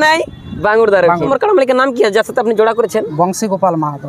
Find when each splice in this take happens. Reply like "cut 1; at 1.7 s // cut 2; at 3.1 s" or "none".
cut 1; at 1.3 s